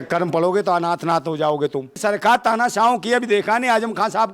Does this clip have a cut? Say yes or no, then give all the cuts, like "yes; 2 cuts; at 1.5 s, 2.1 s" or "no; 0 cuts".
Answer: yes; 1 cut; at 1.9 s